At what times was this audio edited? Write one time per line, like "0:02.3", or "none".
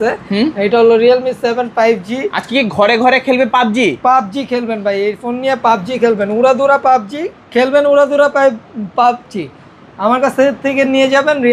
none